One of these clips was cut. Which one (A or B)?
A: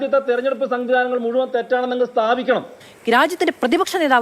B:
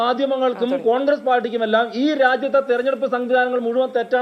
A